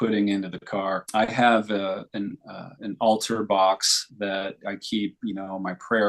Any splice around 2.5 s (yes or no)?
no